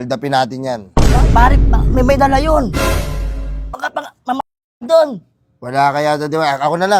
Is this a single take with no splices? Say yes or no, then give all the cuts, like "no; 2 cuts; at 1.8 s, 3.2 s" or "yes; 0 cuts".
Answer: yes; 0 cuts